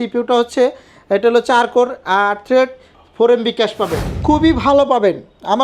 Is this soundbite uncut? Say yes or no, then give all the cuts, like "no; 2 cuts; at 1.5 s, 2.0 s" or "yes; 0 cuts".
no; 1 cut; at 4.1 s